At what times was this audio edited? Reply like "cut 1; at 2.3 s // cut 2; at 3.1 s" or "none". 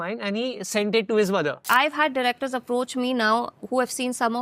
cut 1; at 1.6 s